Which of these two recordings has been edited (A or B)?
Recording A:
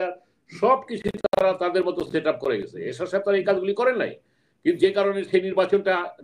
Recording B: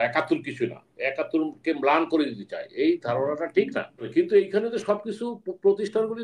B